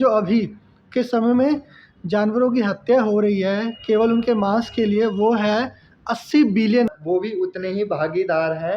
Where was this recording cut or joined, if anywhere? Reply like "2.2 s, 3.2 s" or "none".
7.0 s